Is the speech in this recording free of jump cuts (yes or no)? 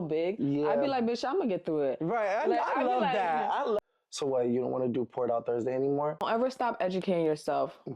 no